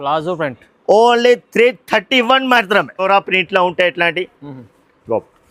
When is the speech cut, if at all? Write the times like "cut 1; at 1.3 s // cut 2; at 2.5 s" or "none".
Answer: cut 1; at 3.0 s